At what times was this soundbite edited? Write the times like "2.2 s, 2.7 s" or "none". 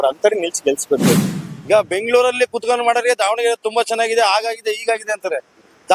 1.3 s